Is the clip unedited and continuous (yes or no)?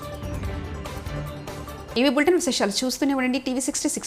yes